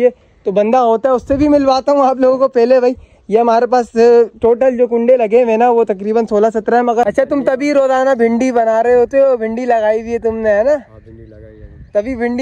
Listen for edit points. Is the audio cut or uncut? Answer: cut